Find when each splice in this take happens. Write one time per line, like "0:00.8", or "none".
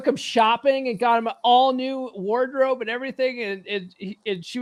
none